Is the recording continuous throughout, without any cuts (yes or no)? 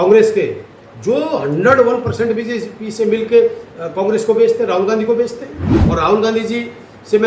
no